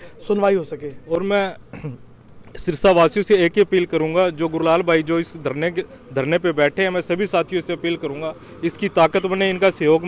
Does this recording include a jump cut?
no; 0 cuts

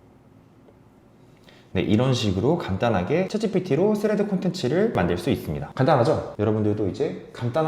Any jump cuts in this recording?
yes; 1 cut; at 6.3 s

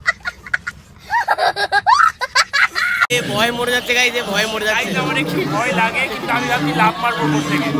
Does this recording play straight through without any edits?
no; 1 cut; at 3.1 s

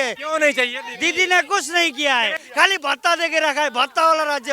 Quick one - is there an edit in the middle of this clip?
yes; 1 cut; at 2.3 s

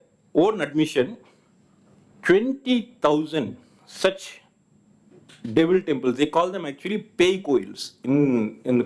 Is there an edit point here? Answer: no; 0 cuts

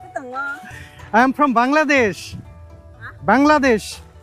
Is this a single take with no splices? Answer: yes; 0 cuts

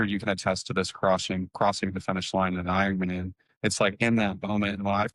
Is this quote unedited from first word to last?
yes; 0 cuts

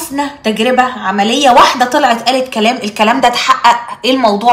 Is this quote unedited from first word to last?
yes; 0 cuts

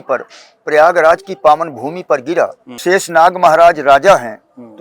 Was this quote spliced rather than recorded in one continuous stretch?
yes; 1 cut; at 2.7 s

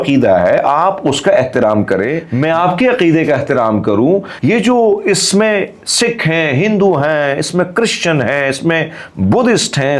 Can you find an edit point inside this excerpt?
yes; 2 cuts; at 2.2 s, 4.3 s

